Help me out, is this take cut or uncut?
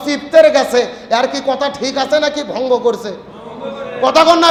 uncut